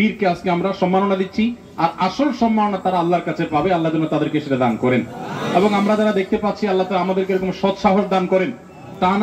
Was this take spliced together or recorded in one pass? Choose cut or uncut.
uncut